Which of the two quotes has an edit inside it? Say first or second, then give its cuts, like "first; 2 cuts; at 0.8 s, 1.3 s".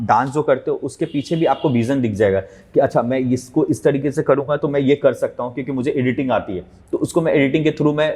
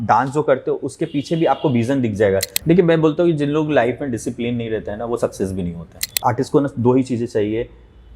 second; 2 cuts; at 2.5 s, 6.2 s